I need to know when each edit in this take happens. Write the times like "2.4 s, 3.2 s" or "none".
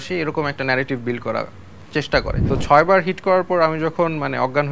2.4 s